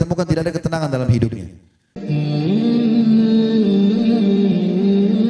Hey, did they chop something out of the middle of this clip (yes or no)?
yes